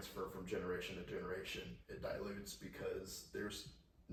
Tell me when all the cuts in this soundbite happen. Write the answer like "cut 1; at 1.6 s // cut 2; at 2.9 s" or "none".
none